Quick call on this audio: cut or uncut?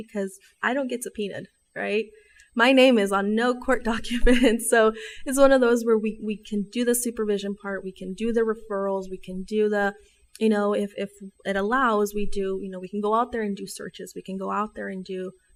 uncut